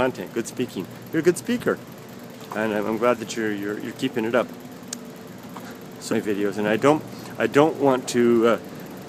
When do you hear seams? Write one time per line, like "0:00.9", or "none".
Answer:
none